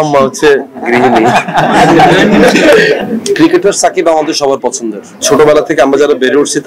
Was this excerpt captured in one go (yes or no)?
no